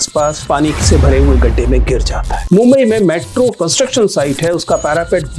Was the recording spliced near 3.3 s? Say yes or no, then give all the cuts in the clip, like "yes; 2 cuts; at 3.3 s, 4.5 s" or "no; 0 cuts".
no; 0 cuts